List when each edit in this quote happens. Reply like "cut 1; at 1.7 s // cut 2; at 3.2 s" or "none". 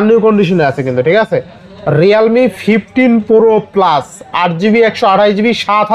none